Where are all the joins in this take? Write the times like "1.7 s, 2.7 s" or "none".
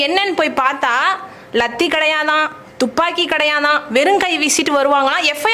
none